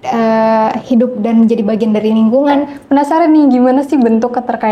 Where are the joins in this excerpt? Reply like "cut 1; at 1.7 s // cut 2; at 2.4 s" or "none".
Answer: cut 1; at 2.8 s